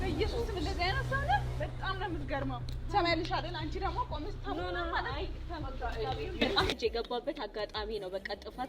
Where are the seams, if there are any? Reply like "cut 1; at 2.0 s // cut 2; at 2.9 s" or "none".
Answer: cut 1; at 6.8 s